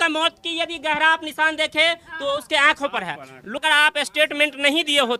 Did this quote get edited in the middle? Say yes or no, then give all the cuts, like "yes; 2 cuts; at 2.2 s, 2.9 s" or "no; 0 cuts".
yes; 1 cut; at 3.5 s